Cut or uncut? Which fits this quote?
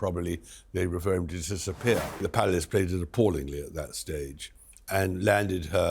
cut